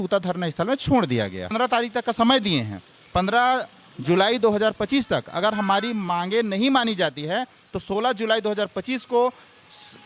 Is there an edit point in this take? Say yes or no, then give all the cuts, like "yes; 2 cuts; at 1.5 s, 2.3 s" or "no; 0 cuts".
yes; 1 cut; at 1.5 s